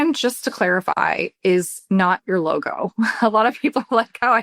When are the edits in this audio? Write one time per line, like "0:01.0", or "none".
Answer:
none